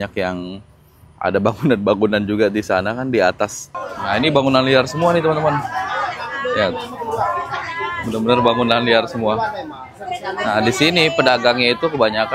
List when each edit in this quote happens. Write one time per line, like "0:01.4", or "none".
0:03.6